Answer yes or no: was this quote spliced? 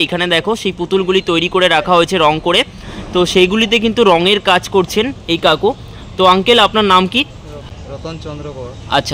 no